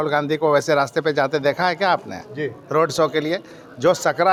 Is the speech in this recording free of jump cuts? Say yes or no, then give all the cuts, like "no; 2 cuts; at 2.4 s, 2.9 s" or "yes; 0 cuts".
yes; 0 cuts